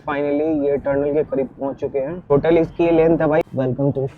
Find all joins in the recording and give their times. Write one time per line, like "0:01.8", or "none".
0:02.3
0:03.4